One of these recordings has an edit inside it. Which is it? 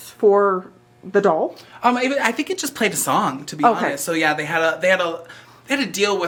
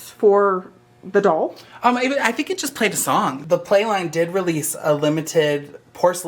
second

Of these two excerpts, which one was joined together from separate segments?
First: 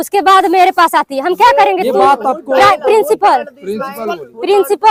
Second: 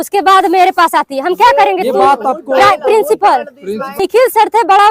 second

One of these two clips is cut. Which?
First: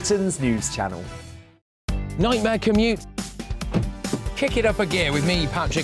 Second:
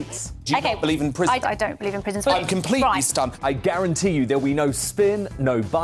first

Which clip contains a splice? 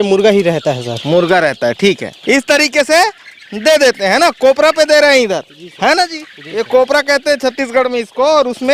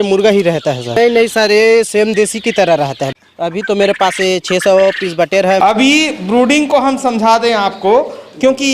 second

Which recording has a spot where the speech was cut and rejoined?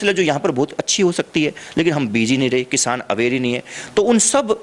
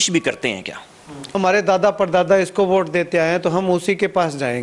second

